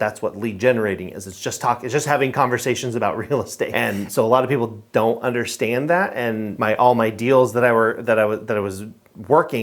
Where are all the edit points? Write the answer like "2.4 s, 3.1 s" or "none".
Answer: 3.7 s, 6.5 s